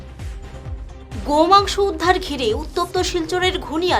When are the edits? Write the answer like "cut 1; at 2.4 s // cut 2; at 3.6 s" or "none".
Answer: cut 1; at 1.1 s